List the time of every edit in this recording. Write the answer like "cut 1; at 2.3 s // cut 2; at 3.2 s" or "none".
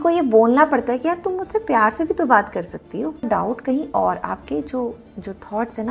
cut 1; at 3.2 s